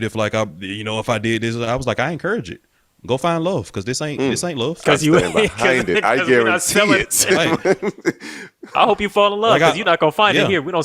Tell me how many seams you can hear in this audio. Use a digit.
0